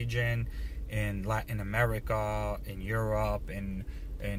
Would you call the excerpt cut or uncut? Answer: uncut